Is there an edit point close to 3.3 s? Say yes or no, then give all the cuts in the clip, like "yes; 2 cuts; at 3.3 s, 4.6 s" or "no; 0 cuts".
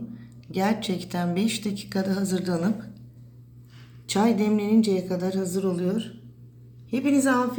no; 0 cuts